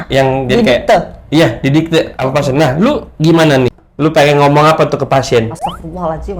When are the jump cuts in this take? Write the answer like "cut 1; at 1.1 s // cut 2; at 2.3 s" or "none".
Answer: cut 1; at 3.8 s

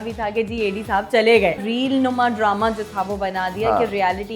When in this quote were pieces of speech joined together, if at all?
cut 1; at 1.6 s

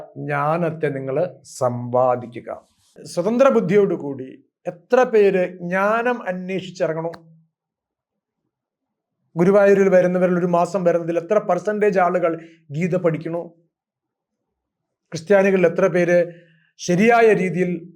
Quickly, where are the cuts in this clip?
cut 1; at 3.0 s

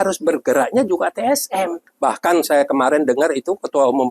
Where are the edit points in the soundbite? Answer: cut 1; at 1.8 s

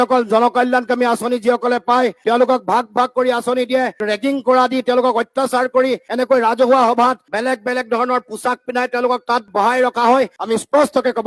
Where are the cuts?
cut 1; at 10.4 s

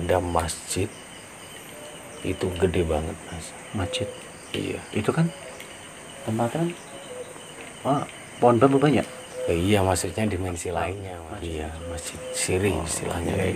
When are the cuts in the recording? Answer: cut 1; at 11.1 s

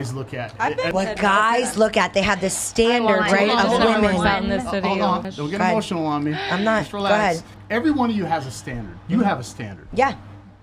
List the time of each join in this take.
cut 1; at 0.9 s // cut 2; at 5.3 s // cut 3; at 7.5 s

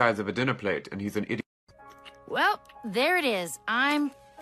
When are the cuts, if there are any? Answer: cut 1; at 1.6 s

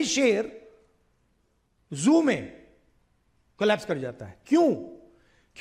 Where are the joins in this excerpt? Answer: none

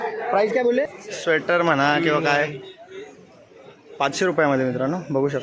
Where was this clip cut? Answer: cut 1; at 1.0 s

